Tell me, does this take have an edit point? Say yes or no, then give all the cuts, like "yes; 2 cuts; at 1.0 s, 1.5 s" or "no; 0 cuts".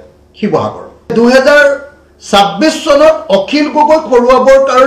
yes; 1 cut; at 1.1 s